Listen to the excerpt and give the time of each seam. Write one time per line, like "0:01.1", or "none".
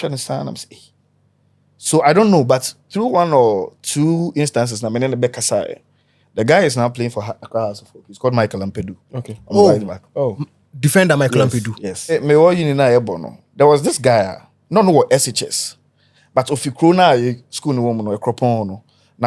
0:12.1